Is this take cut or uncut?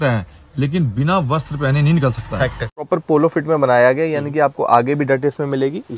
cut